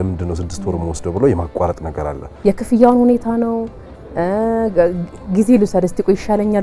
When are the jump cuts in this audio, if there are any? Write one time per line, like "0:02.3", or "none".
0:02.3